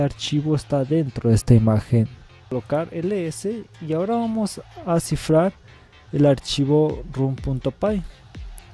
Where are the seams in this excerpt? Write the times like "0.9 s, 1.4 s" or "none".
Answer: 2.5 s